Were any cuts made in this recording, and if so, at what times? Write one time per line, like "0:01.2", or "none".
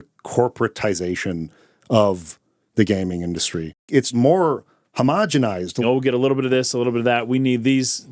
0:03.8
0:05.8